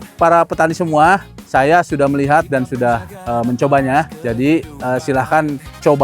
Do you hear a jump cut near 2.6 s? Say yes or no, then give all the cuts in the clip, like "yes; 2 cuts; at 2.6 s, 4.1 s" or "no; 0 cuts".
no; 2 cuts; at 1.3 s, 4.2 s